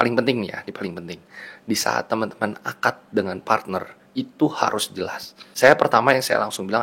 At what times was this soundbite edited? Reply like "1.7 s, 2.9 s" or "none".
5.4 s